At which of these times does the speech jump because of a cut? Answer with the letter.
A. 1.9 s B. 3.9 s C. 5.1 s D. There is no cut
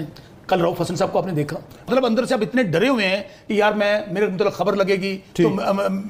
A